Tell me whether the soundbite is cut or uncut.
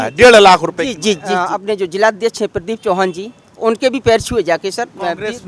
cut